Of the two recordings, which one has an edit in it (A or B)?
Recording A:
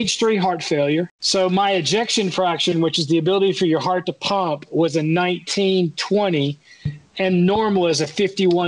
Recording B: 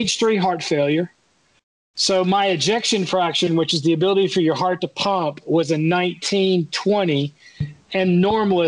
A